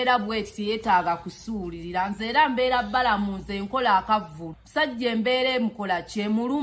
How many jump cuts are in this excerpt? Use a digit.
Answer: 1